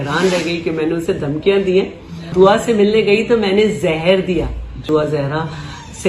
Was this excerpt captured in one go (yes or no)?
no